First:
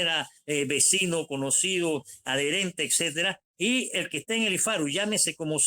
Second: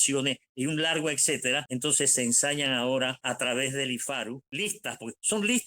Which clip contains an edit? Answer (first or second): second